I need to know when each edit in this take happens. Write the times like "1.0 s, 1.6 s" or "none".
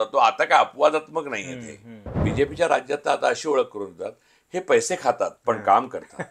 2.3 s